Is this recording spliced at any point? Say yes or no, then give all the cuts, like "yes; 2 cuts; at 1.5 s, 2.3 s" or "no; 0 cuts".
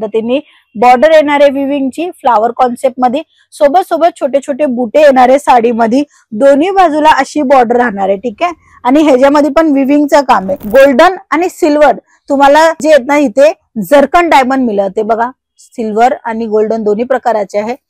yes; 1 cut; at 10.6 s